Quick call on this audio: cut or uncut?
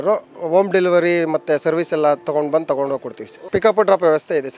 cut